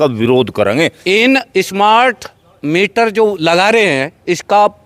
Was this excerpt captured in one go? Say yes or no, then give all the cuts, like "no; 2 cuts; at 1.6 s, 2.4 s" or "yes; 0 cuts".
no; 1 cut; at 1.0 s